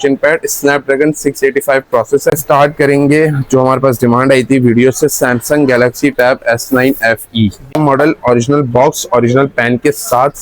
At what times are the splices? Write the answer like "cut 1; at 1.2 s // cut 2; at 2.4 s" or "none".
cut 1; at 2.3 s // cut 2; at 7.8 s